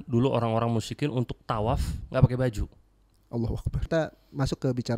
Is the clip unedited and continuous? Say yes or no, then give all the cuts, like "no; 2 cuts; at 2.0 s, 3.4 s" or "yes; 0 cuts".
no; 1 cut; at 3.9 s